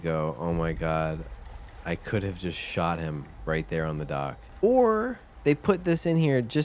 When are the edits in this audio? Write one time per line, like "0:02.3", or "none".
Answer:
0:04.4
0:05.3